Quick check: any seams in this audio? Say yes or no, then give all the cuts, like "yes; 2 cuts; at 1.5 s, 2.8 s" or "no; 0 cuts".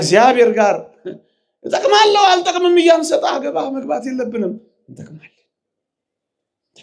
no; 0 cuts